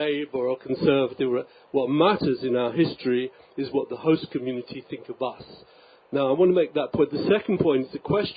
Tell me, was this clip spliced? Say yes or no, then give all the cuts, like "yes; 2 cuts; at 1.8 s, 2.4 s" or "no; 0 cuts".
yes; 1 cut; at 6.3 s